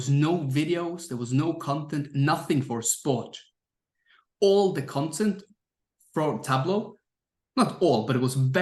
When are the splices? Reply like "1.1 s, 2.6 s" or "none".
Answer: none